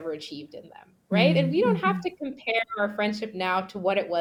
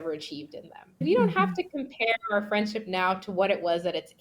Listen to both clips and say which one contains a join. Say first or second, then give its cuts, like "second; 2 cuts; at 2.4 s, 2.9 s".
second; 1 cut; at 1.0 s